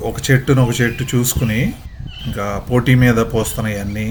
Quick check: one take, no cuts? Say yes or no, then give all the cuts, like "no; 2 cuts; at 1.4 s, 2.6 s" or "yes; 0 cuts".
yes; 0 cuts